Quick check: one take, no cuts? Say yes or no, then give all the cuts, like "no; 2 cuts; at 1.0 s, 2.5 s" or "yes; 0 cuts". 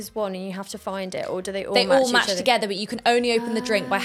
yes; 0 cuts